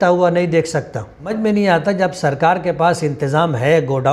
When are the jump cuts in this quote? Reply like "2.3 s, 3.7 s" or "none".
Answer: 1.3 s